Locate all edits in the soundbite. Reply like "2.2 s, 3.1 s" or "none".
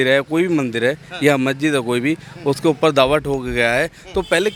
none